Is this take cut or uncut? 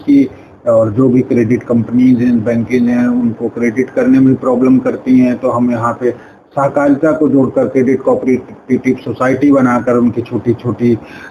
uncut